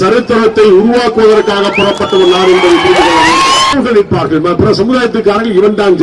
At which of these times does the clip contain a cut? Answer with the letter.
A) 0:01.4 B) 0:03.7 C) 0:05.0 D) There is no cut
B